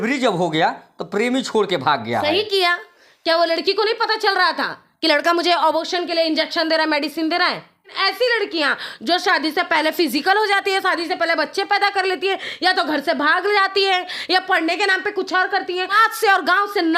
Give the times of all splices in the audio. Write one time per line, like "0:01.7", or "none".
0:08.0
0:16.0